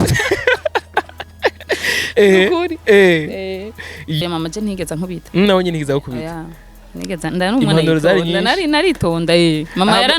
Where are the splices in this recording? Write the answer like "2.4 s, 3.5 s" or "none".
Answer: 4.2 s

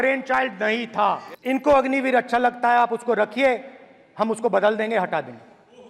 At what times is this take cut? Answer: 1.3 s

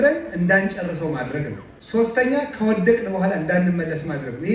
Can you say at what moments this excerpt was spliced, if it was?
1.7 s

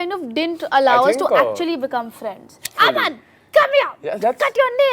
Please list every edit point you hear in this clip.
2.6 s

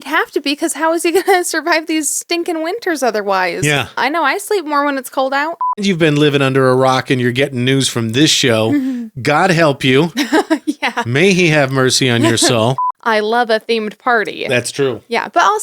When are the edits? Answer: 4.0 s, 5.8 s, 12.9 s

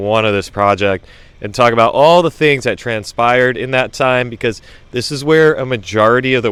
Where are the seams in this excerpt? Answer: none

